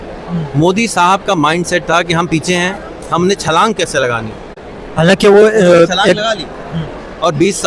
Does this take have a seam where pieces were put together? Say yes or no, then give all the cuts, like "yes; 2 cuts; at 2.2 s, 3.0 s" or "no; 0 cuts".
no; 0 cuts